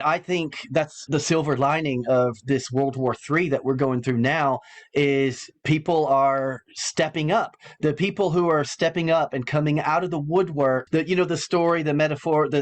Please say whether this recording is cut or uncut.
cut